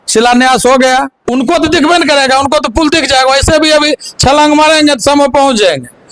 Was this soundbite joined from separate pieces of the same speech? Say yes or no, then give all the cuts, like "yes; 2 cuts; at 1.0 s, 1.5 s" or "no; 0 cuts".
yes; 1 cut; at 1.2 s